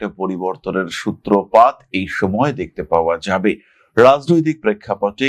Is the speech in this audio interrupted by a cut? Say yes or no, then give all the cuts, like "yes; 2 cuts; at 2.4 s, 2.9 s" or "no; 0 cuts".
no; 0 cuts